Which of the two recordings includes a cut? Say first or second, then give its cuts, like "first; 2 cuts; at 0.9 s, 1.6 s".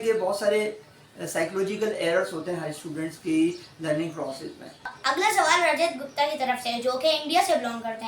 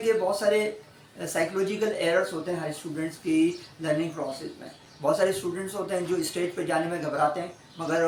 first; 1 cut; at 4.9 s